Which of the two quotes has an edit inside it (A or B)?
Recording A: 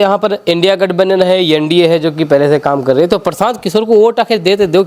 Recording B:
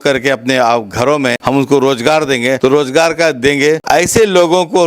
B